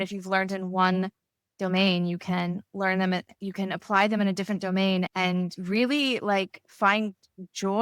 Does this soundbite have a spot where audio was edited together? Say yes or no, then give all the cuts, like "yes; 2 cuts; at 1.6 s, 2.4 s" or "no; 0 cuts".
yes; 1 cut; at 5.1 s